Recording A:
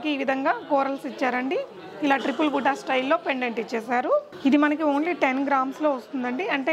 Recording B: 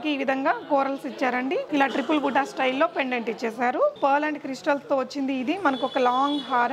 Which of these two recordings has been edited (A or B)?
B